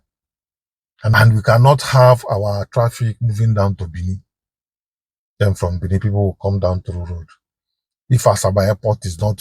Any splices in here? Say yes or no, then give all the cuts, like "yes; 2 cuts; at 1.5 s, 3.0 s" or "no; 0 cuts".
yes; 1 cut; at 1.1 s